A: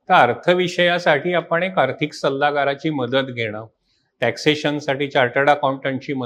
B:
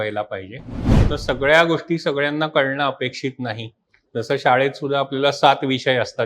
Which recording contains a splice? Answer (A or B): B